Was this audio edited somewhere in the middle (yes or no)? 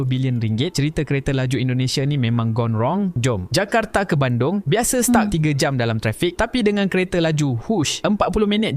no